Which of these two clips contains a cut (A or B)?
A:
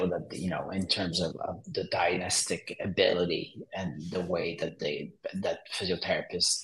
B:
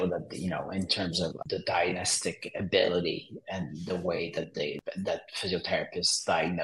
B